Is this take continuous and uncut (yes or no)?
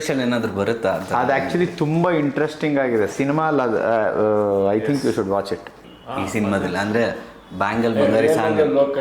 no